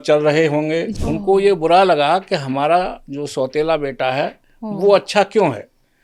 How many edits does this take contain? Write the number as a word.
one